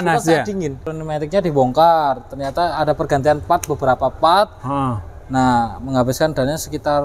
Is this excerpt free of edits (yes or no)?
no